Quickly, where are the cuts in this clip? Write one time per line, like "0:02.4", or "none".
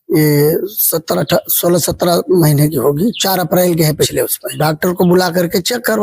0:04.6